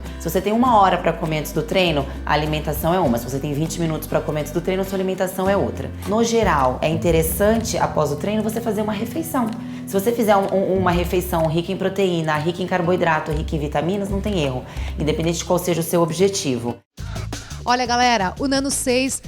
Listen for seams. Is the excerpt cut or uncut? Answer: cut